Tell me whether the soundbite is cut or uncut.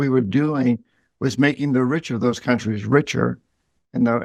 uncut